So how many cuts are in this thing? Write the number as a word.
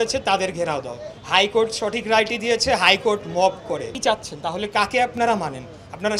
one